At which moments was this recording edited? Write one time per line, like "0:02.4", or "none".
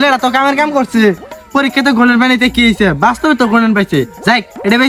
none